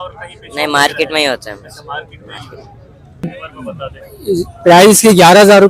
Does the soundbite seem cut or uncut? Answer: cut